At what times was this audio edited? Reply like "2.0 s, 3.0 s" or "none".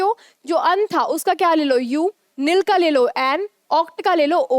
none